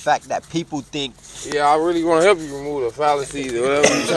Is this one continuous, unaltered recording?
yes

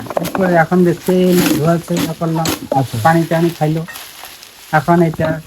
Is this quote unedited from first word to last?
yes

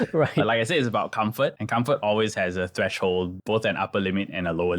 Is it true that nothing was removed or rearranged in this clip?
no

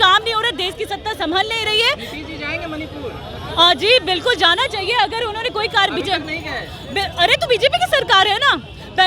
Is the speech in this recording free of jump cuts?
yes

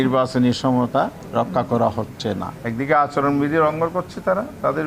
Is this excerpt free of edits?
no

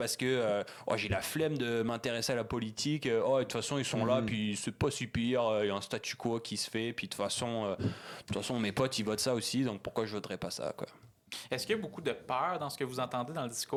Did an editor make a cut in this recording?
no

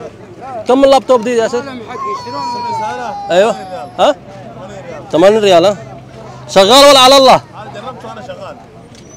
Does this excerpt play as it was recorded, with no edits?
yes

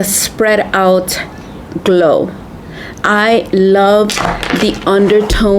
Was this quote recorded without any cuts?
yes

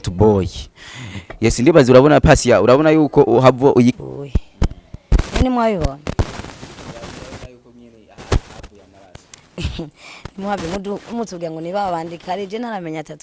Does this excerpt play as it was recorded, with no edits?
no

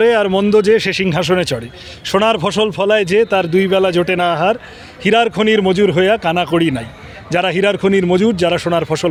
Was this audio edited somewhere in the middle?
no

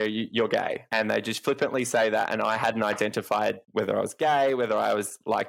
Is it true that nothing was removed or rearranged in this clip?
yes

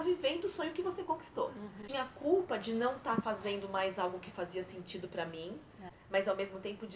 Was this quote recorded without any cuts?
no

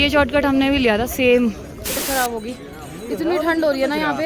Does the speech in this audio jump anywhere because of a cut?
yes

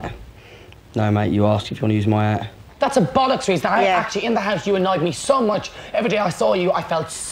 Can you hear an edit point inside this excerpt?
yes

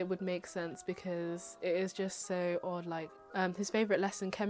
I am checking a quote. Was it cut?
yes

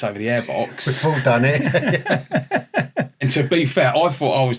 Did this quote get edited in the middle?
yes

